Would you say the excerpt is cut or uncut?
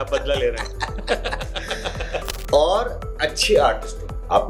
uncut